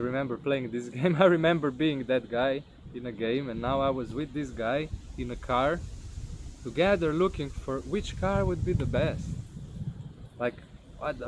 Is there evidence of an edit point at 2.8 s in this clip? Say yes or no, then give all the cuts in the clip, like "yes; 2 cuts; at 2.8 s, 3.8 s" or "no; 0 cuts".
no; 0 cuts